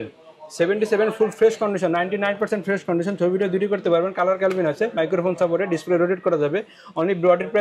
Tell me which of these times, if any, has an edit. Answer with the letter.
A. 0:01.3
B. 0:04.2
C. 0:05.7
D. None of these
D